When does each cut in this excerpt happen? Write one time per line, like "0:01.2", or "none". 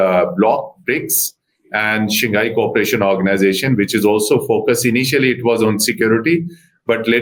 none